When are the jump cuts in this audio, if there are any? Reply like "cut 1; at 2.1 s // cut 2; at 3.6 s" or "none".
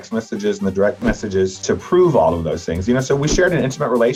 none